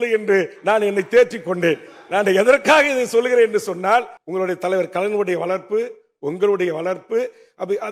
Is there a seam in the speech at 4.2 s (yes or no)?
yes